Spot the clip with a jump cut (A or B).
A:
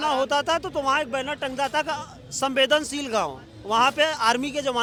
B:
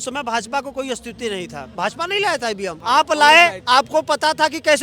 B